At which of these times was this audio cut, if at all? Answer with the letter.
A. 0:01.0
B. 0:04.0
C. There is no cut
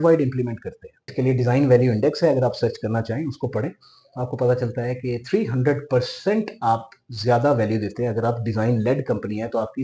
A